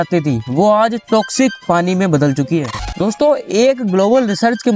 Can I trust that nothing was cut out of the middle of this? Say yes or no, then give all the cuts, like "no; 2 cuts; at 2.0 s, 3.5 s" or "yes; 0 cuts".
no; 1 cut; at 2.9 s